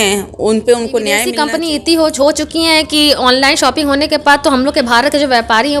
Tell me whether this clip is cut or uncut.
cut